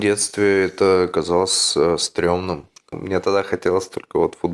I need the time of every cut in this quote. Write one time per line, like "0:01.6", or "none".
0:03.0